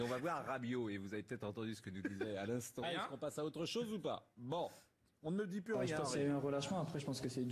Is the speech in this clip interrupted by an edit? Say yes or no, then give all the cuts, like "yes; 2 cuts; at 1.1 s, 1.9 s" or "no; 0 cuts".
no; 0 cuts